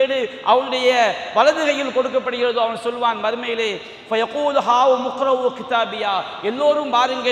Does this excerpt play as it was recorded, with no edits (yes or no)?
yes